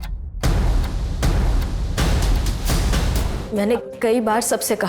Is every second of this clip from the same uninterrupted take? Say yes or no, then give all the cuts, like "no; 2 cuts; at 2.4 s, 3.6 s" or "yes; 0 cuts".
no; 1 cut; at 3.3 s